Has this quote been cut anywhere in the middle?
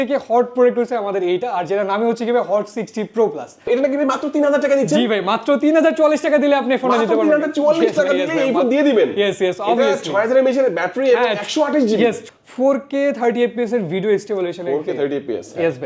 yes; 2 cuts; at 3.7 s, 12.2 s

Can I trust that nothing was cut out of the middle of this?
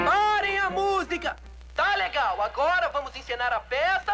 no; 1 cut; at 2.9 s

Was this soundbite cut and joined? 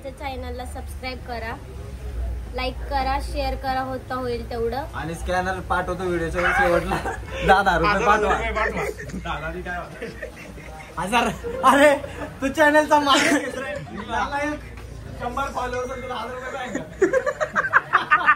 no; 0 cuts

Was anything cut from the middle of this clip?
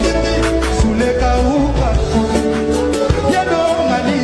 no; 0 cuts

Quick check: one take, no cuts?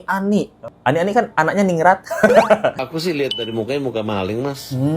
no; 1 cut; at 2.8 s

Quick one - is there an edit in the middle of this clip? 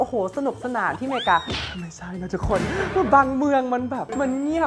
no; 0 cuts

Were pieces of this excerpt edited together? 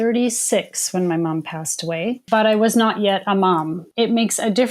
yes; 2 cuts; at 2.2 s, 3.8 s

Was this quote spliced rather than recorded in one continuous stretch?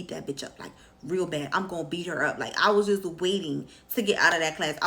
no; 0 cuts

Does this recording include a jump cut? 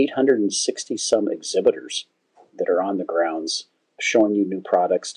no; 0 cuts

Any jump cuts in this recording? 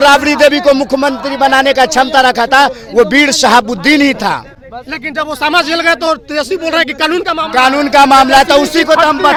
no; 0 cuts

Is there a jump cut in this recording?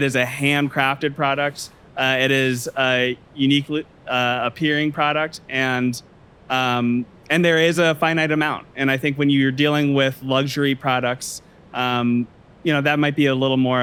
no; 0 cuts

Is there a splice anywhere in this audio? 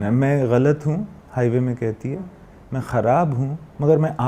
no; 0 cuts

